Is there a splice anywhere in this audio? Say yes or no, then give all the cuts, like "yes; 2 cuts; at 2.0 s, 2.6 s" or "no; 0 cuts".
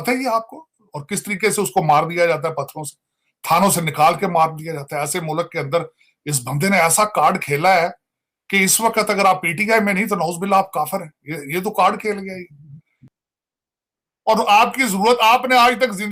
yes; 1 cut; at 13.1 s